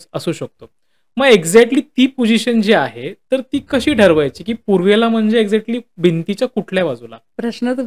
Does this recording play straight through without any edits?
yes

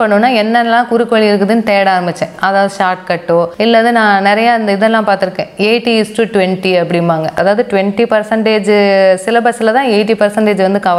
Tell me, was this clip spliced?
no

